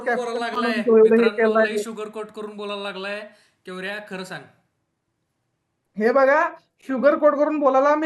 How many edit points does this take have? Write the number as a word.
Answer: zero